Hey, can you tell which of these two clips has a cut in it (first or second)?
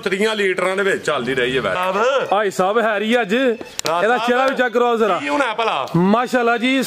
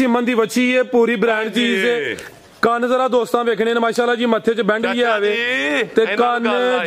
first